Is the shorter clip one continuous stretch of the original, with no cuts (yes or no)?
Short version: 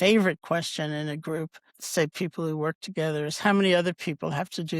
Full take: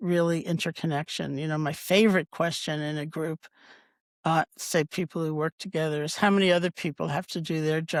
no